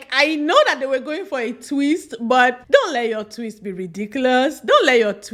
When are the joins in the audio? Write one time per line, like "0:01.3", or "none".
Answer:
none